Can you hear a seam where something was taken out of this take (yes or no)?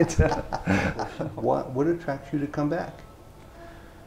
yes